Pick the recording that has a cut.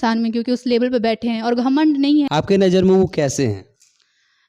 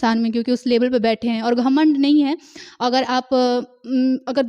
first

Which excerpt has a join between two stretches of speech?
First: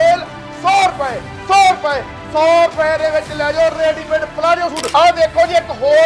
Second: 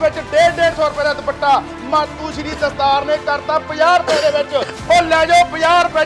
first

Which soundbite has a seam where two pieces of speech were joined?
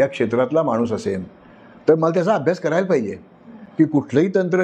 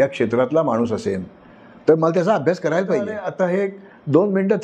second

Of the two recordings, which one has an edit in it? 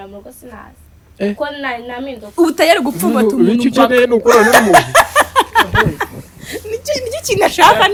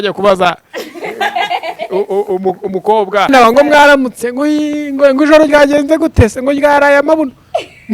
second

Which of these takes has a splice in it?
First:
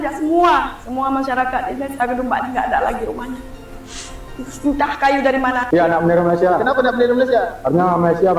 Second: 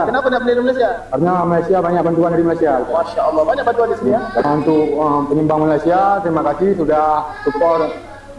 first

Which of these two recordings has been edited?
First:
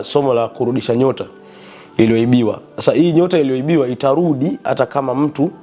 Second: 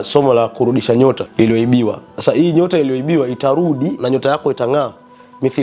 second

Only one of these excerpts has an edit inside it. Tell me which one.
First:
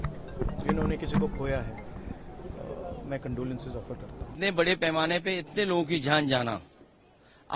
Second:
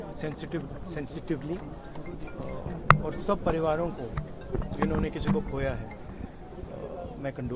first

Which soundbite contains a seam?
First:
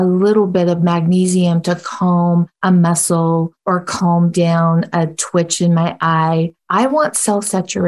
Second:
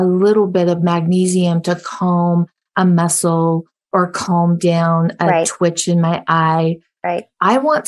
first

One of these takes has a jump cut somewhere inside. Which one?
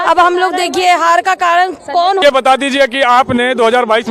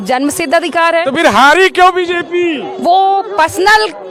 first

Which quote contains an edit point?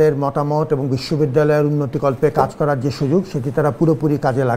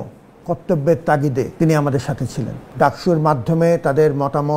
second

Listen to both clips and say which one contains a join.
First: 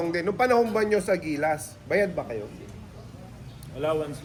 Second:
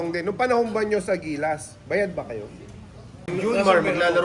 second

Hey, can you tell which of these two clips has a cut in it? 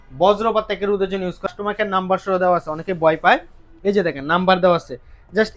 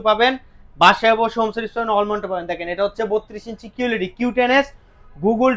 first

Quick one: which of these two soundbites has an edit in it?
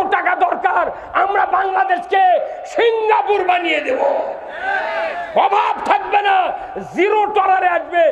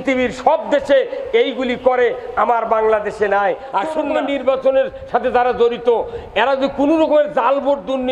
second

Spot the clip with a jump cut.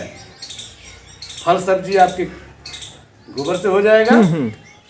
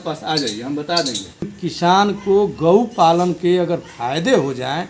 second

